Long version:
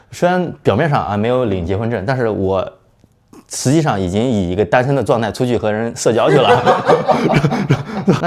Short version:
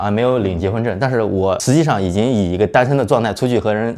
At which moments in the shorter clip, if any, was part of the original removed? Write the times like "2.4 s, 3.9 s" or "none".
1.6 s